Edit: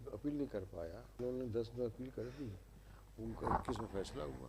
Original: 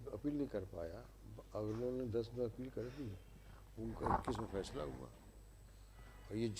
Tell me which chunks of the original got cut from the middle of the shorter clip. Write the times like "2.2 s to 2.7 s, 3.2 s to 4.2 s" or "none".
1.2 s to 1.8 s